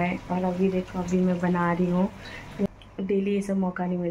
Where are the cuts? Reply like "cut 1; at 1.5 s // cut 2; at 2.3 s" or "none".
cut 1; at 2.7 s